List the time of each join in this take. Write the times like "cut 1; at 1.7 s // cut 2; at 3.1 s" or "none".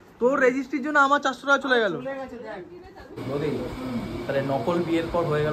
cut 1; at 3.1 s